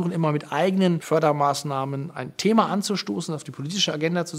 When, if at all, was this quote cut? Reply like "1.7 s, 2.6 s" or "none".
1.0 s

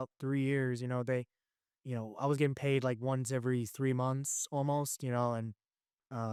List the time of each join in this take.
none

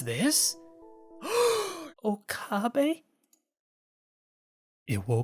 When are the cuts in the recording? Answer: 1.8 s

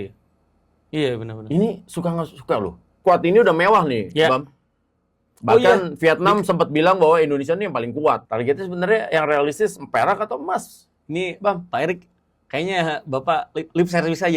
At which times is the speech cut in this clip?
2.9 s, 8.2 s

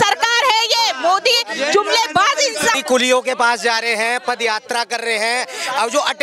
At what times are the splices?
2.8 s

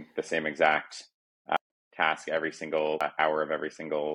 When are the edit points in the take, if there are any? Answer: 1.6 s, 3.0 s

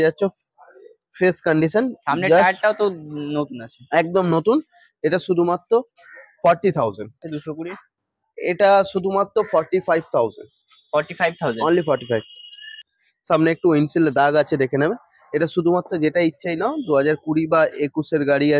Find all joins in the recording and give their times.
7.4 s, 12.8 s

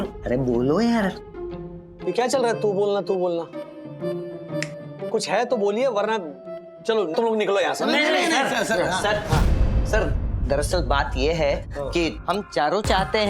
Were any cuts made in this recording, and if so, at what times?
12.2 s

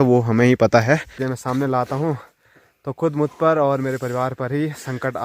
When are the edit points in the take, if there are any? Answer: 1.3 s

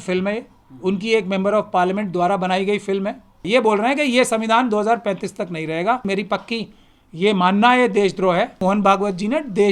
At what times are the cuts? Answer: 3.4 s, 6.1 s, 8.6 s

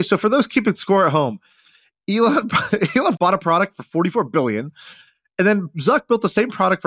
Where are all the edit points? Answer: 3.2 s

